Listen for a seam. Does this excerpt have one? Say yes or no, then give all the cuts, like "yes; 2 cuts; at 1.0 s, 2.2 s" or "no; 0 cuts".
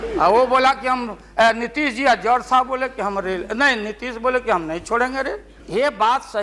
yes; 1 cut; at 5.5 s